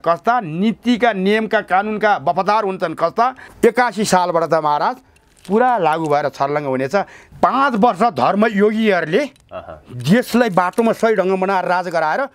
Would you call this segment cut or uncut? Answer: cut